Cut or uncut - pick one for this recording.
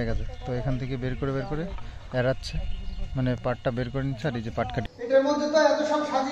cut